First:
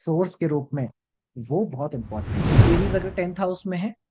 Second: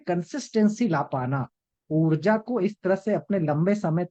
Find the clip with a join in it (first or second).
first